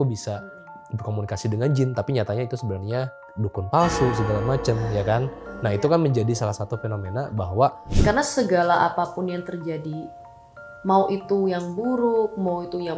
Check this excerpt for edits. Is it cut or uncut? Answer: cut